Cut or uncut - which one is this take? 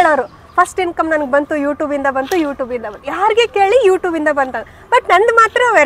uncut